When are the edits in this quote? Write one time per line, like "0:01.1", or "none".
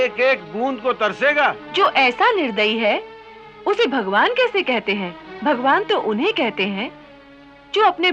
0:01.6
0:05.2